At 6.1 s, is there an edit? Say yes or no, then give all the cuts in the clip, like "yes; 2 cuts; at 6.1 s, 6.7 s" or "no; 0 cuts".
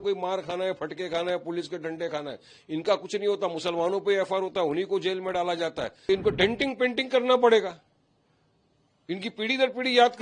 yes; 1 cut; at 6.1 s